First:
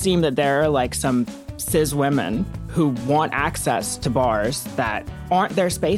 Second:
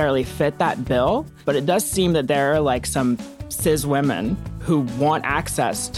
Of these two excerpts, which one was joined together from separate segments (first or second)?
first